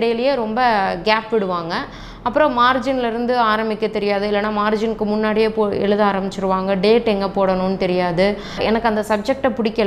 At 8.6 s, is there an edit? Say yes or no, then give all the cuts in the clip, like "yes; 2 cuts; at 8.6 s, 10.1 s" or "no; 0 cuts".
yes; 1 cut; at 8.6 s